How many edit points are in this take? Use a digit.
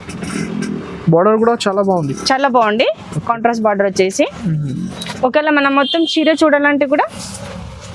0